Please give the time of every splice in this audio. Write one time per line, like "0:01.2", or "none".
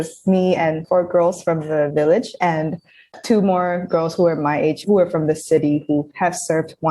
0:00.8
0:03.0
0:04.8
0:06.1